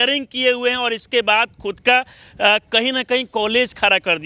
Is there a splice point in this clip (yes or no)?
no